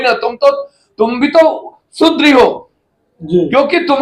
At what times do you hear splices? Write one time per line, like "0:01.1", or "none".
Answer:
none